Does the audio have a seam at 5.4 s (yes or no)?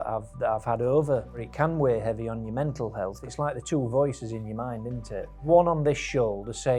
yes